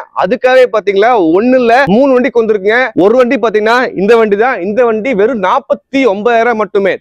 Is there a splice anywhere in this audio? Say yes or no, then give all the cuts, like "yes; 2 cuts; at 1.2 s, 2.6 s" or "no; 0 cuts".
no; 0 cuts